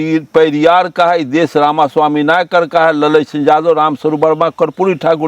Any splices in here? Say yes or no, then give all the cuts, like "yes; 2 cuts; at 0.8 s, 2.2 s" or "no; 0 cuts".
no; 0 cuts